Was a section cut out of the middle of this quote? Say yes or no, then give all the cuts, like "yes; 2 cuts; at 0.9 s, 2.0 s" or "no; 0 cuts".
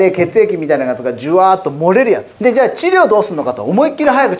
yes; 1 cut; at 2.3 s